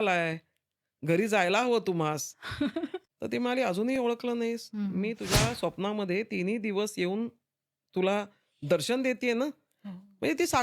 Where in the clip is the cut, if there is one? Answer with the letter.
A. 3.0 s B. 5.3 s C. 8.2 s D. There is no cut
A